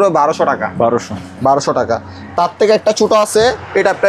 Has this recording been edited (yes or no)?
no